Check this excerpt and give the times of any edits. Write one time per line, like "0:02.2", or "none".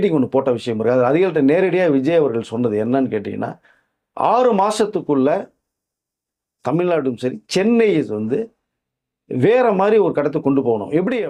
none